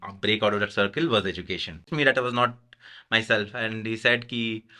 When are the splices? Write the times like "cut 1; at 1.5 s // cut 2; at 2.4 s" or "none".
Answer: cut 1; at 1.9 s